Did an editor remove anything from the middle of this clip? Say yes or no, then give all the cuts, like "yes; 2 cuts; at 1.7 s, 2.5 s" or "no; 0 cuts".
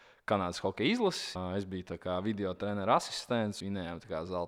yes; 2 cuts; at 1.3 s, 3.6 s